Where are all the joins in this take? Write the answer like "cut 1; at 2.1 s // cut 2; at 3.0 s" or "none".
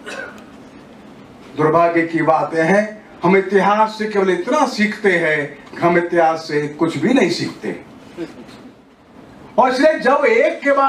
cut 1; at 8.9 s